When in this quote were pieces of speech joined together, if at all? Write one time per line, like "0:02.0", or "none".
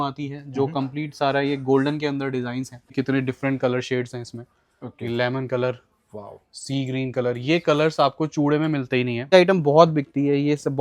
0:02.9
0:09.3